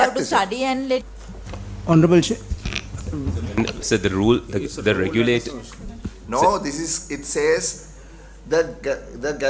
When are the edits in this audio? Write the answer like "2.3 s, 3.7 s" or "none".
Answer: 1.0 s